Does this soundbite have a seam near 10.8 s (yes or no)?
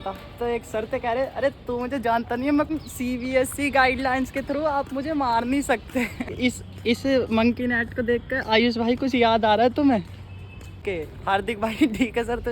yes